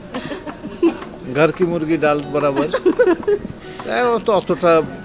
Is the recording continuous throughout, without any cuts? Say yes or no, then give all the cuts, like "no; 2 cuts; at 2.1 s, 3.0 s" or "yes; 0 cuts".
yes; 0 cuts